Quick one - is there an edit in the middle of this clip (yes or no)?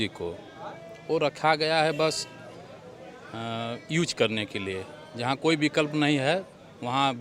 no